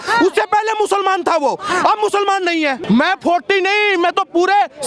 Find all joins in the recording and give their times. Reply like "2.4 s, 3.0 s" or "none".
2.8 s